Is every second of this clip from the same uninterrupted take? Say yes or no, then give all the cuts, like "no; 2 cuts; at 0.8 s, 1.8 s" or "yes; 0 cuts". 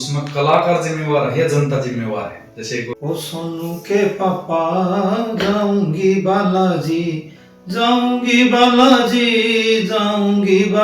no; 1 cut; at 2.9 s